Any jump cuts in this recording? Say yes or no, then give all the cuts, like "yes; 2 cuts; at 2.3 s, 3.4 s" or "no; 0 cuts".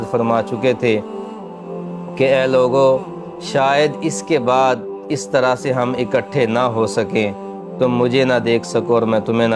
no; 0 cuts